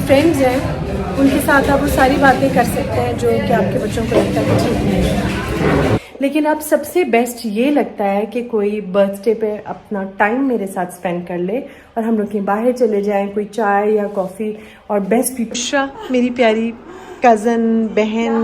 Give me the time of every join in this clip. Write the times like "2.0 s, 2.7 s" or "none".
6.0 s, 15.6 s